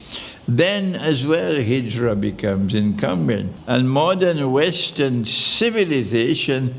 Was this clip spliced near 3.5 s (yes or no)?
yes